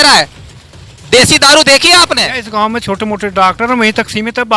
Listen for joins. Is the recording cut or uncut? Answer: cut